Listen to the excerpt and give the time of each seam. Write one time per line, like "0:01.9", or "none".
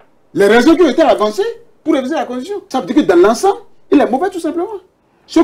0:02.6

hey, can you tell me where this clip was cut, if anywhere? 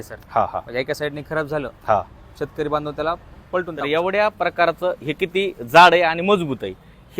0:03.8

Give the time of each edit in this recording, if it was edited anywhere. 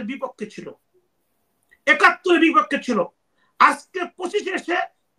none

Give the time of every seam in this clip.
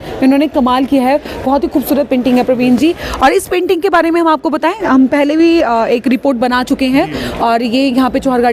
none

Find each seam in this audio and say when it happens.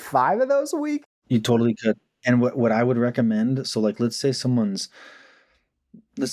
0:01.3

